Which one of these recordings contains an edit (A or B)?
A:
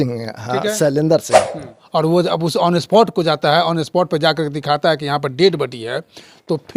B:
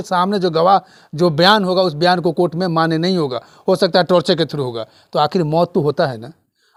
A